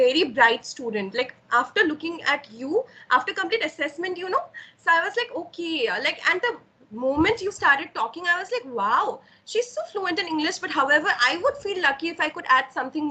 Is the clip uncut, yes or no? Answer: yes